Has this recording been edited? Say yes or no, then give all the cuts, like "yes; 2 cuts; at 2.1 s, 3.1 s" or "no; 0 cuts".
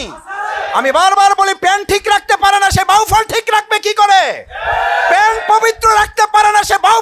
no; 0 cuts